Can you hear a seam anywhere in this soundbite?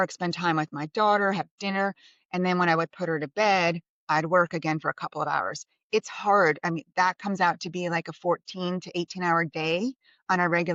no; 0 cuts

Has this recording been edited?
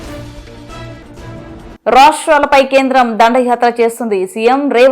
yes; 1 cut; at 1.7 s

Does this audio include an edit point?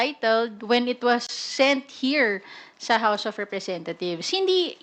no; 0 cuts

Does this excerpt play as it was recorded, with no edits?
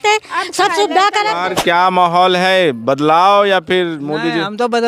no; 1 cut; at 1.4 s

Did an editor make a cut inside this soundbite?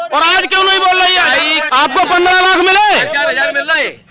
yes; 1 cut; at 1.6 s

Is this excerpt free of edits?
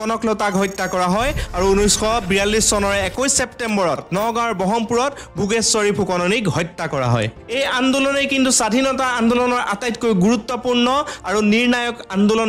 yes; 0 cuts

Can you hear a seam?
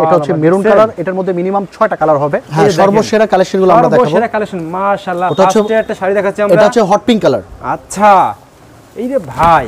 yes; 1 cut; at 2.4 s

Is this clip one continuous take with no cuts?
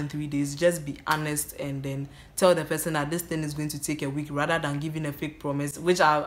yes; 0 cuts

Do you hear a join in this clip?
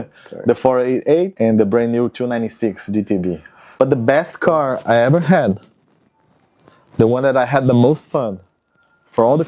yes; 2 cuts; at 1.3 s, 3.6 s

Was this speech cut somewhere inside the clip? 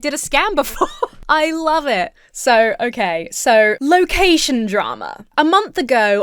no; 0 cuts

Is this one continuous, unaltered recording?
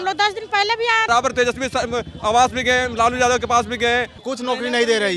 no; 2 cuts; at 1.1 s, 4.2 s

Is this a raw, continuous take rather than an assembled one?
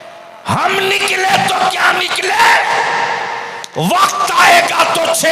yes; 0 cuts

